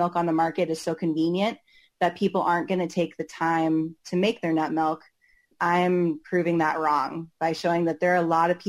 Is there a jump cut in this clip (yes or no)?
no